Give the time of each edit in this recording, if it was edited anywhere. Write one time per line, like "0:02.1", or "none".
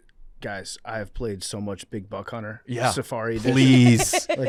none